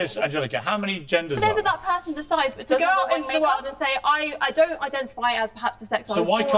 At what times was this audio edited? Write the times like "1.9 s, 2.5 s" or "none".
1.4 s